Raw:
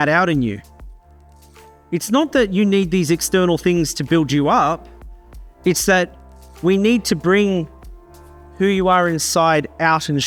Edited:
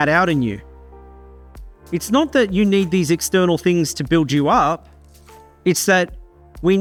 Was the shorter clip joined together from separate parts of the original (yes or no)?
no